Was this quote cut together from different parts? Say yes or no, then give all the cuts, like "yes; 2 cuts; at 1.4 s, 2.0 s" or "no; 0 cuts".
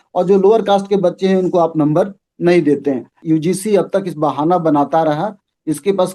yes; 1 cut; at 3.2 s